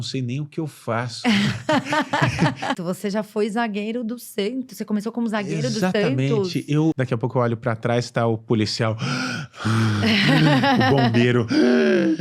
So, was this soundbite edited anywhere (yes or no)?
yes